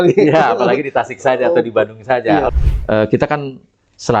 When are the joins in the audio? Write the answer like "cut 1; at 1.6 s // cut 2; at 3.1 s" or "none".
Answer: cut 1; at 2.5 s